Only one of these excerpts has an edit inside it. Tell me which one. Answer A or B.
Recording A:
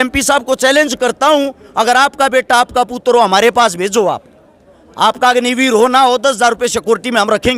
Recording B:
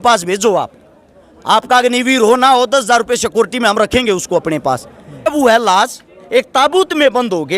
B